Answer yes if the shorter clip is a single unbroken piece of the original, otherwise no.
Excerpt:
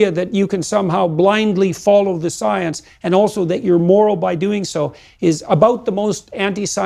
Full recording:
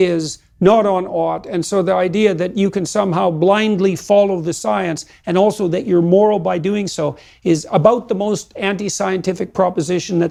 yes